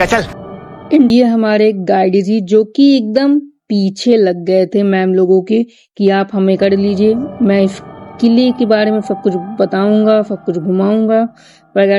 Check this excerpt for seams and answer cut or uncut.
cut